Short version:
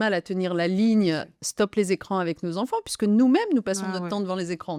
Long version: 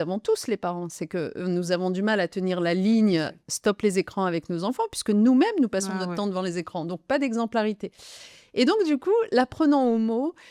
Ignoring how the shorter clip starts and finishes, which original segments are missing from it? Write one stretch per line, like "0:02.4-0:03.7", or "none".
none